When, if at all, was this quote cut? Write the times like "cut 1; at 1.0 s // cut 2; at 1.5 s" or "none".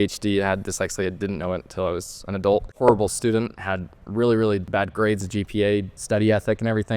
cut 1; at 2.7 s // cut 2; at 4.7 s // cut 3; at 5.9 s